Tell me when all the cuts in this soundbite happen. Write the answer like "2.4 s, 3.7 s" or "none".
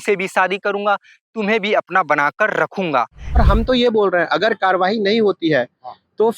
3.4 s